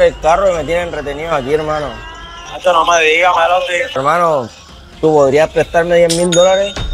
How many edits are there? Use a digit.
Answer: 1